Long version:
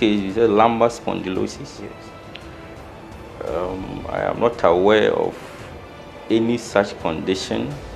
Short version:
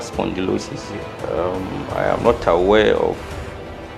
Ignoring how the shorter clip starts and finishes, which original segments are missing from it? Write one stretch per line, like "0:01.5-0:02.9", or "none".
0:02.0-0:03.2